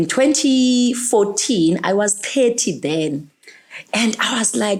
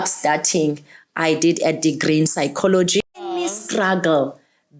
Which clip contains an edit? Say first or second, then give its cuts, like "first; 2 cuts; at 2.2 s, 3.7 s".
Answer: second; 1 cut; at 3.4 s